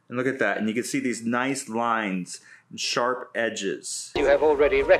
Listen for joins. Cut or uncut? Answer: cut